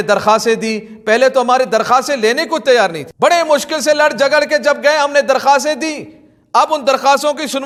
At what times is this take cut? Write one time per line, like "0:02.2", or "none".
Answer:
none